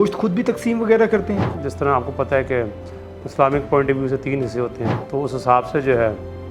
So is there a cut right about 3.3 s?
no; 2 cuts; at 1.6 s, 4.9 s

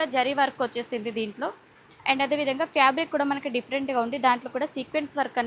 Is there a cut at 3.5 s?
no; 0 cuts

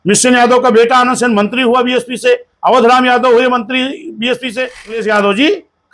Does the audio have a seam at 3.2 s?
no; 1 cut; at 4.9 s

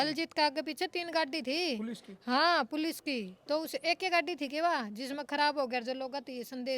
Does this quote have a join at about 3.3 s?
no; 0 cuts

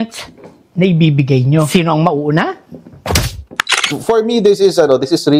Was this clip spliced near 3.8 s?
yes; 1 cut; at 3.8 s

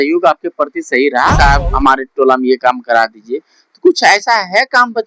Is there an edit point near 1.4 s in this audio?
yes; 1 cut; at 1.4 s

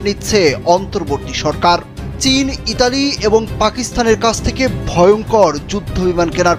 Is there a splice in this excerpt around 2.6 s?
no; 0 cuts

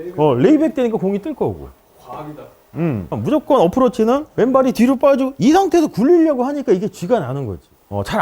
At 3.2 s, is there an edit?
yes; 1 cut; at 3.2 s

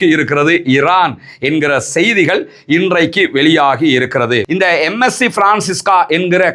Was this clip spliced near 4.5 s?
yes; 1 cut; at 4.5 s

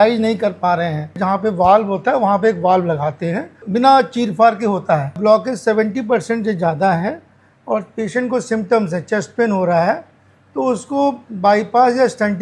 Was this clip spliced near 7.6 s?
no; 3 cuts; at 1.2 s, 3.6 s, 5.2 s

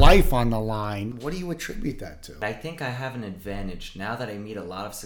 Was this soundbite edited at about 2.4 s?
yes; 2 cuts; at 1.1 s, 2.4 s

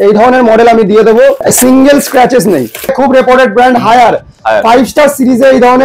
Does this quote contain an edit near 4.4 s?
no; 2 cuts; at 1.4 s, 2.9 s

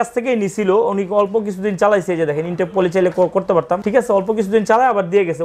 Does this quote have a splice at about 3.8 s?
yes; 1 cut; at 3.8 s

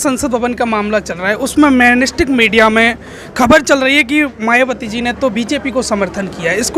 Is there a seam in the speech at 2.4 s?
no; 0 cuts

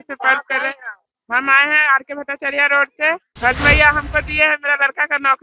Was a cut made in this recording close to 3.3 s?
yes; 1 cut; at 3.3 s

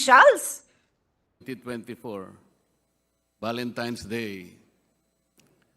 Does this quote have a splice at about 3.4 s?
no; 1 cut; at 1.4 s

